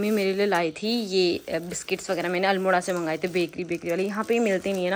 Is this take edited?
no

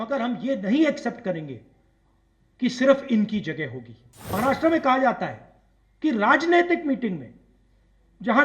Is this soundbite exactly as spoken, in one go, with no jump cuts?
no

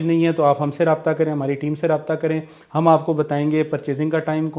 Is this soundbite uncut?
yes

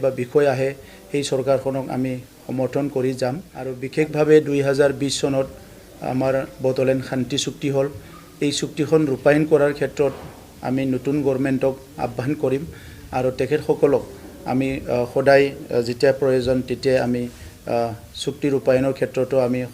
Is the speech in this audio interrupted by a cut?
yes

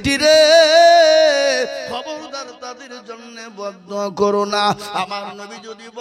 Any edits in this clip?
no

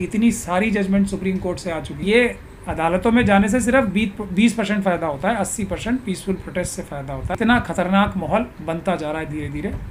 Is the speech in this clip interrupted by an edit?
yes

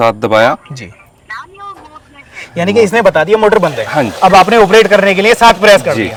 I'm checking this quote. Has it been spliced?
no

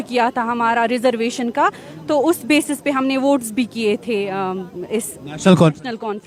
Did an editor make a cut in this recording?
no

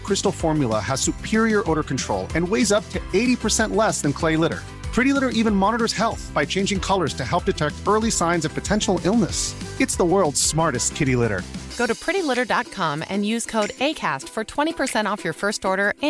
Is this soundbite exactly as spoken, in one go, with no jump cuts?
yes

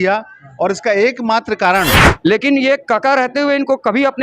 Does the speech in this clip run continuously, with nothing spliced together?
no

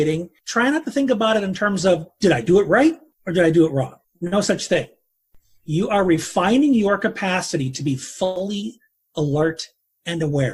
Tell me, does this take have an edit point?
no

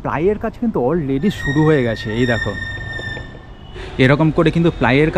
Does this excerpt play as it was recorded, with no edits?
yes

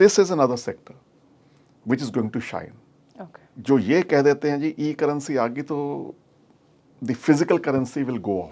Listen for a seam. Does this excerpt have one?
yes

